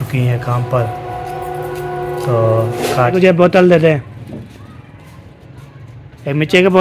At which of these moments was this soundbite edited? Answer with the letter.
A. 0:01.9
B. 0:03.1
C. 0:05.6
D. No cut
B